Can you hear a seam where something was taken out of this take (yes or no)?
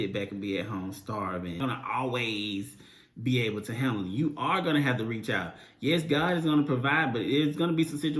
yes